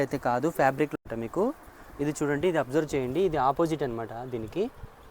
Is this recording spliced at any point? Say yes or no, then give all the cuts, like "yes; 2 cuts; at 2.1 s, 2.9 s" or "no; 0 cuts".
yes; 1 cut; at 1.0 s